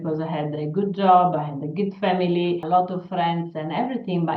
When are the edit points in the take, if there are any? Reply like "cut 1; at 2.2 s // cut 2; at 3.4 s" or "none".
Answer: cut 1; at 2.6 s